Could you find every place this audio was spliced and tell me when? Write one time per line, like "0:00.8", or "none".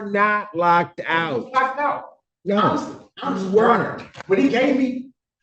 none